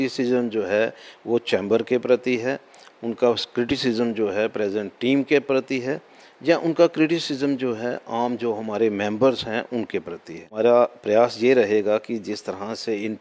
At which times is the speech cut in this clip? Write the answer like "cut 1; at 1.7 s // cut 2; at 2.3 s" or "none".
cut 1; at 10.4 s